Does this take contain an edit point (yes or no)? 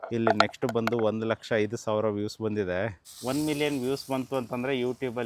yes